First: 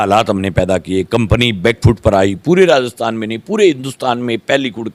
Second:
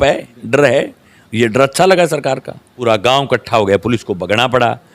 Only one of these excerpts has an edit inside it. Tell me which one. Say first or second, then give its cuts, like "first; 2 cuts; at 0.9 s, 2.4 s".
second; 1 cut; at 2.8 s